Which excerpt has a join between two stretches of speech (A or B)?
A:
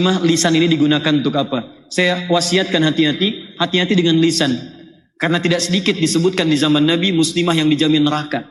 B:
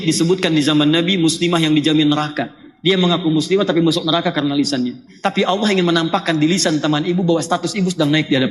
B